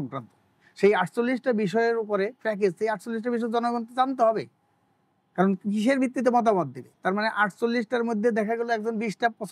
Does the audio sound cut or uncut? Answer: uncut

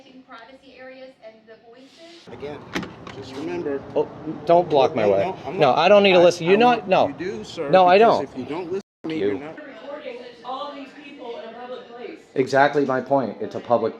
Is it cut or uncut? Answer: cut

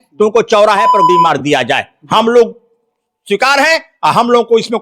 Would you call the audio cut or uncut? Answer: cut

